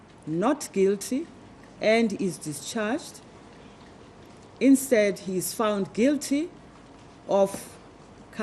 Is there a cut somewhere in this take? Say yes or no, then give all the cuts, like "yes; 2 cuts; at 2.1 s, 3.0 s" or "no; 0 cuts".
no; 0 cuts